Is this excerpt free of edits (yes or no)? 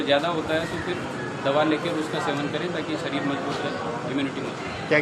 yes